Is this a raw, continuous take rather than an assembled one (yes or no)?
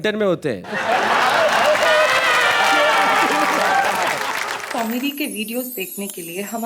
no